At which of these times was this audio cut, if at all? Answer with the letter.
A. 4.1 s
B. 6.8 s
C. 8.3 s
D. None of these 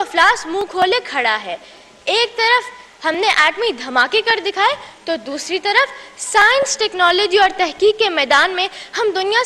D